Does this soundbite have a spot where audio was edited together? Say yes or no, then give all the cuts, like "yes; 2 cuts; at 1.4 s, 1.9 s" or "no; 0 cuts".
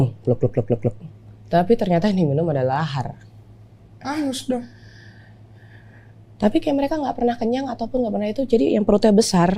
no; 0 cuts